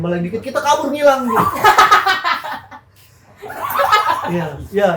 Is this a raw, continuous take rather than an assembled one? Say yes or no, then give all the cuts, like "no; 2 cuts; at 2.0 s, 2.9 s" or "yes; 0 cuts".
yes; 0 cuts